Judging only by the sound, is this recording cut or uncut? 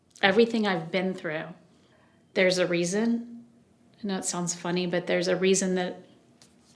cut